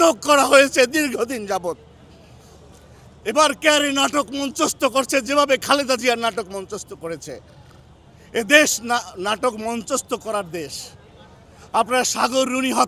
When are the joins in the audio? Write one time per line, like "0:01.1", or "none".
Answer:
none